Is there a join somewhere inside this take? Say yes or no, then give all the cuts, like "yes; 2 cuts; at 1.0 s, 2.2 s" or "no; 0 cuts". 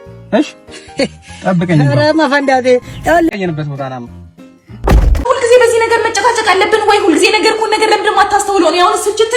yes; 2 cuts; at 3.3 s, 5.0 s